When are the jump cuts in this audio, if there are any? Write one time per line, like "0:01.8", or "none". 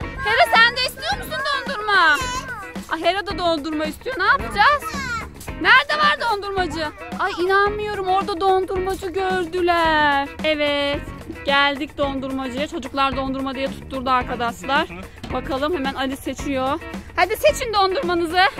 0:10.3